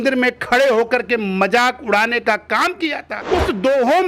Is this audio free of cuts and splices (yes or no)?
no